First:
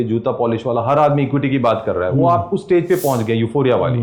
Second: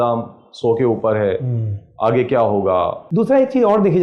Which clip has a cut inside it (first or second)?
second